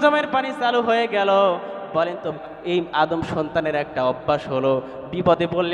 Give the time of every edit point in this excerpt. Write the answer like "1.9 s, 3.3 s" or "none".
2.3 s